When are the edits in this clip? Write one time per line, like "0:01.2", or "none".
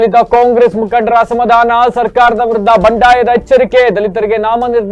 none